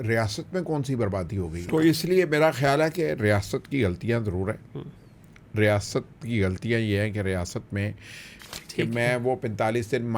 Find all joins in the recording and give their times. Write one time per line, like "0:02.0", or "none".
0:01.6
0:08.5